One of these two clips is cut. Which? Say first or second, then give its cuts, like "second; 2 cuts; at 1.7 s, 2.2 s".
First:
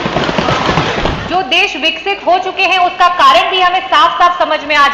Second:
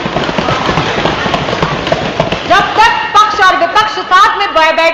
first; 1 cut; at 1.2 s